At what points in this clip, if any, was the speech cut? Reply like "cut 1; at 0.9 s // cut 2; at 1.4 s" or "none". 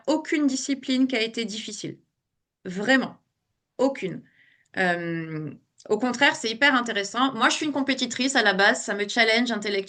none

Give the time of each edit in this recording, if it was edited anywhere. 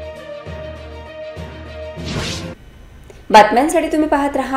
none

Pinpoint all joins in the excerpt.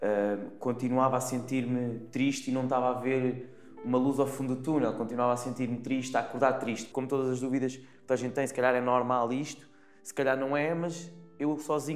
cut 1; at 6.8 s

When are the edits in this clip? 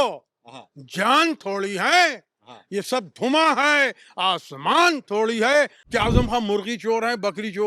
cut 1; at 5.8 s

